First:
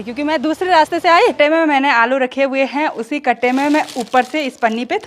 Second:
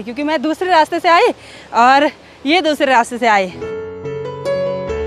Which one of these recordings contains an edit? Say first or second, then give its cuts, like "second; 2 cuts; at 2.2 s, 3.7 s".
first; 1 cut; at 1.4 s